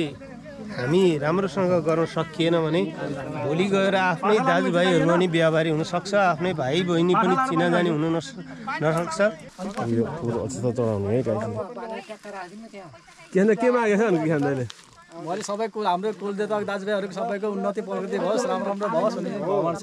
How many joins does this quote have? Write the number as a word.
one